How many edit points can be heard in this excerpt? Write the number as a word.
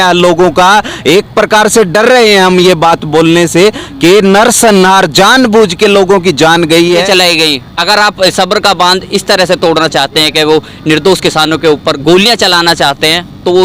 one